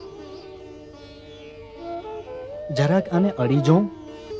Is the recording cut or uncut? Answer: uncut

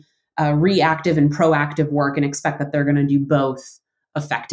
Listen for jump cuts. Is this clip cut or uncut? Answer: uncut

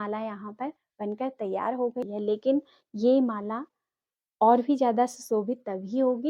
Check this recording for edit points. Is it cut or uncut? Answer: cut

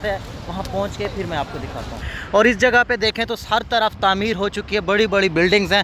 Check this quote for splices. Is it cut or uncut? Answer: cut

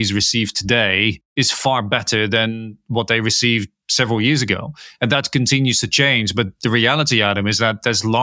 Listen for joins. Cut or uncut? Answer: cut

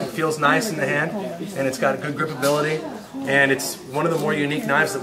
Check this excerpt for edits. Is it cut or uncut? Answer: cut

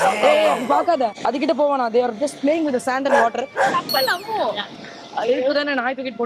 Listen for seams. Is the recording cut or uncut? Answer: uncut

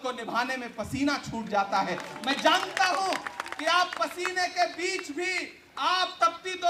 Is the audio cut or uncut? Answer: uncut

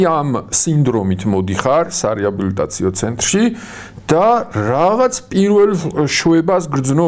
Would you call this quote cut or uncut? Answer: uncut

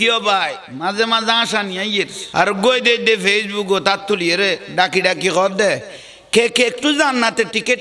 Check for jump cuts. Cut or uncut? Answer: cut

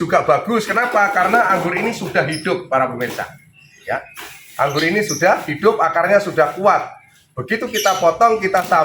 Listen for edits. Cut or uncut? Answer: uncut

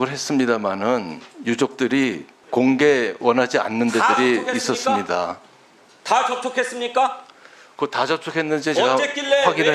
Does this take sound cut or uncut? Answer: cut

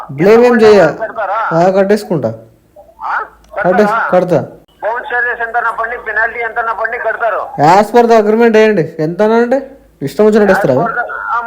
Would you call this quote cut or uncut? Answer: cut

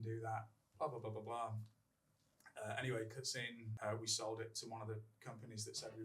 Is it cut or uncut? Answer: cut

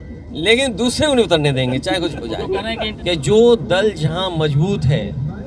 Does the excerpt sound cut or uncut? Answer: cut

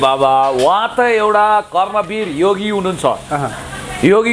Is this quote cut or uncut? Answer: uncut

